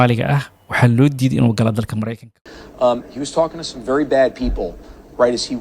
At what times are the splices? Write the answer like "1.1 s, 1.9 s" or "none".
2.4 s